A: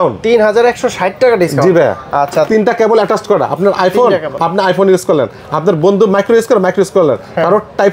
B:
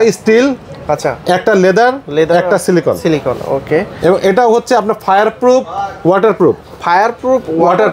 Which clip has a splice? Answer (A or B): A